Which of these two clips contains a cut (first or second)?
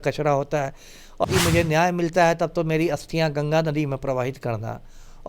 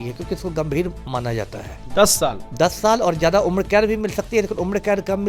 first